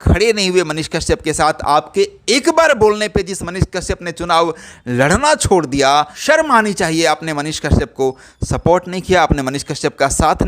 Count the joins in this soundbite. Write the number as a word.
one